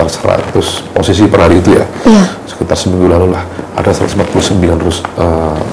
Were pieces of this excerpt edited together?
no; 0 cuts

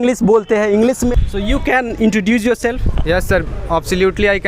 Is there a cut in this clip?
yes; 1 cut; at 1.1 s

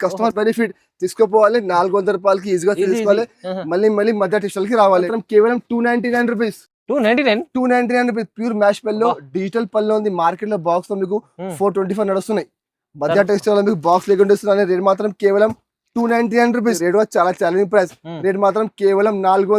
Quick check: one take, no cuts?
no; 2 cuts; at 5.1 s, 16.8 s

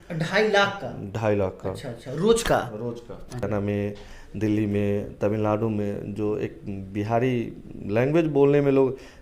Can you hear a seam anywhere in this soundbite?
yes; 1 cut; at 3.4 s

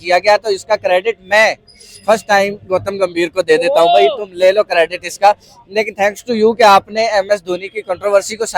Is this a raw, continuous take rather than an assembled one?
yes; 0 cuts

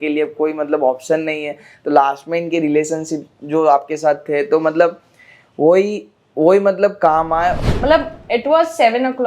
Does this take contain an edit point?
yes; 1 cut; at 7.6 s

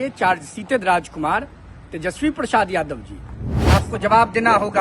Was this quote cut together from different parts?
yes; 1 cut; at 3.5 s

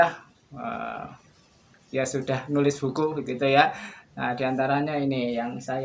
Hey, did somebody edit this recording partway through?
no; 0 cuts

